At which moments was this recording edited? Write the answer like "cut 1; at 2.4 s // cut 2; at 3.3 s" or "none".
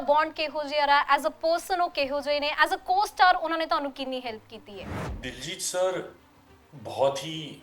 cut 1; at 5.0 s